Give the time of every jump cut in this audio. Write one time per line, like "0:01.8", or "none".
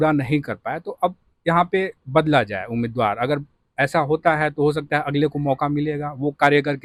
none